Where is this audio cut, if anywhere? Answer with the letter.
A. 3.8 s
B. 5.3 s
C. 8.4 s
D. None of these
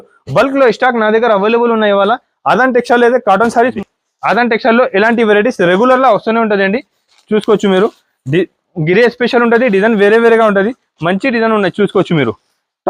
A